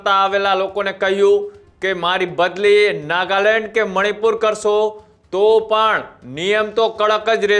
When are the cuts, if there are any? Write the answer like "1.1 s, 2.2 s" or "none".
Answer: none